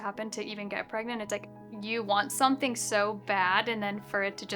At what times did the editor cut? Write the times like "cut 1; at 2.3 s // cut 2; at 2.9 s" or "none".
cut 1; at 1.4 s